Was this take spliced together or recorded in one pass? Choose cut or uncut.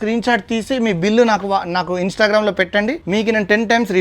cut